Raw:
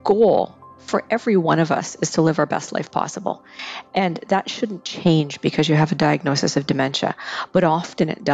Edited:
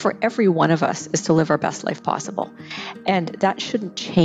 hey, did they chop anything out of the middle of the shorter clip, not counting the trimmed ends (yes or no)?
no